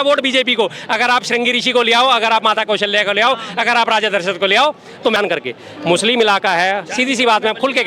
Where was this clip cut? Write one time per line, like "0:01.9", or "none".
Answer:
0:05.2